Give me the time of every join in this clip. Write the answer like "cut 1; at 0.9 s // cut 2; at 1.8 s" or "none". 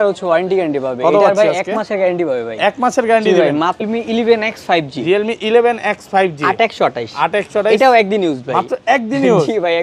cut 1; at 3.8 s